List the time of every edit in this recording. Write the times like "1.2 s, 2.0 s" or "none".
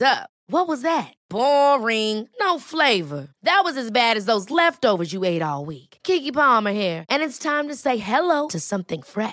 none